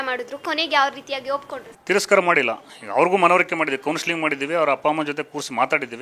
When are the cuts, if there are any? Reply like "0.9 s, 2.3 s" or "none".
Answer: none